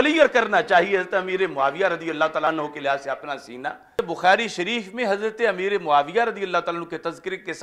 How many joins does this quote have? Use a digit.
2